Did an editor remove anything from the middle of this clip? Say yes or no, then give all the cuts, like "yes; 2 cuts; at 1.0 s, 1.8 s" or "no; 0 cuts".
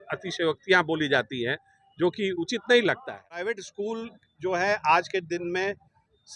yes; 1 cut; at 3.3 s